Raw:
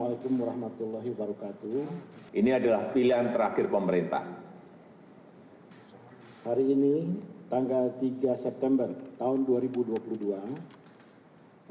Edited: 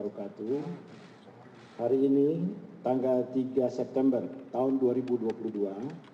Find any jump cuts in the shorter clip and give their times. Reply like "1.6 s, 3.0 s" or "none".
0.9 s